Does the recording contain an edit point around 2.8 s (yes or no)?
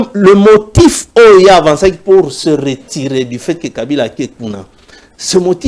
no